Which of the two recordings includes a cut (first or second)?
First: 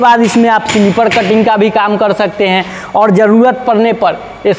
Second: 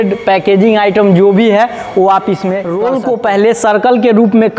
second